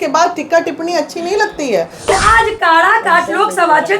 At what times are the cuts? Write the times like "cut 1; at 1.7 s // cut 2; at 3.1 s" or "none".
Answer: cut 1; at 2.1 s

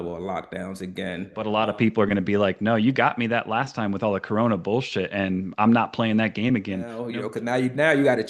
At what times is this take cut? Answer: cut 1; at 1.4 s // cut 2; at 7.0 s

